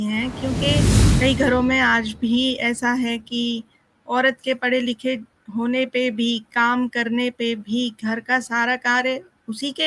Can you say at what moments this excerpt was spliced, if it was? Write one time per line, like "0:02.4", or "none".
0:00.9